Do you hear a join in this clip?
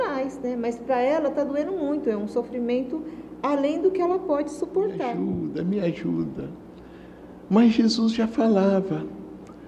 yes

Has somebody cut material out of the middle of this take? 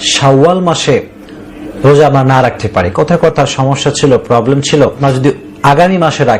yes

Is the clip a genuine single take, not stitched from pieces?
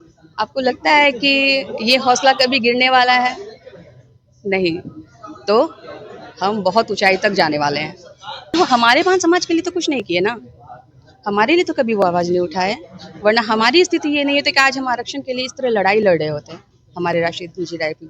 no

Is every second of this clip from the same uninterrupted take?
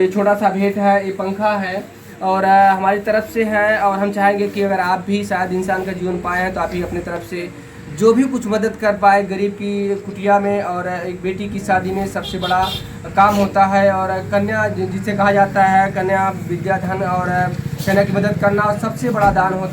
yes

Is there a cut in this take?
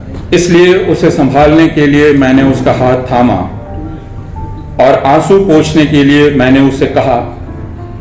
no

